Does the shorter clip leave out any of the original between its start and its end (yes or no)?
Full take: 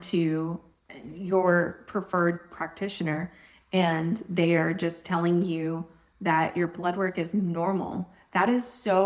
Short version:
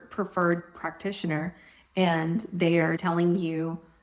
yes